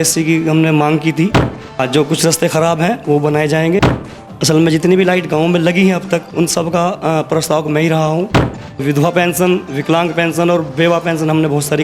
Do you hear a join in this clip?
yes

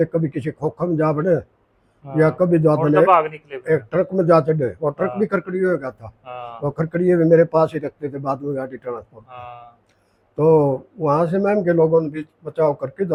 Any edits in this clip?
no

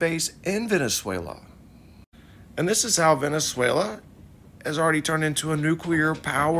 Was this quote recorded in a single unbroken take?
yes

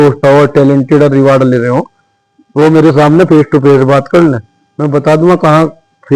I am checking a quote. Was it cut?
no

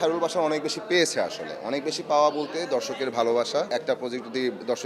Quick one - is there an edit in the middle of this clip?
yes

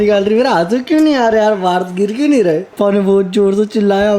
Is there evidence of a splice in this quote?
yes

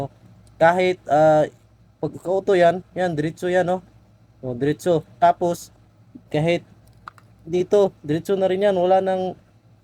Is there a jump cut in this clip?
no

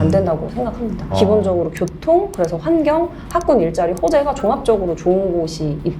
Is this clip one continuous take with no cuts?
yes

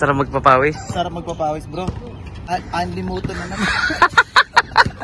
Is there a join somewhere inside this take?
yes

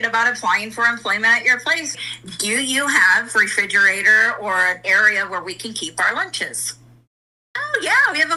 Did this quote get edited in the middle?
no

